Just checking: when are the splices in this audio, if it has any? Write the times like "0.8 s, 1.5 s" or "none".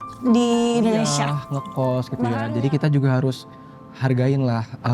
1.4 s